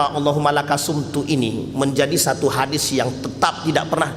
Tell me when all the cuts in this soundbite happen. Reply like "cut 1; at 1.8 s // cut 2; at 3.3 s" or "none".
none